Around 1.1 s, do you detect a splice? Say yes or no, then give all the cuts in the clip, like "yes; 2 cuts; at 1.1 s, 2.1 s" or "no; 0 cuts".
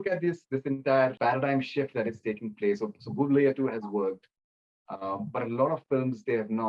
yes; 1 cut; at 1.1 s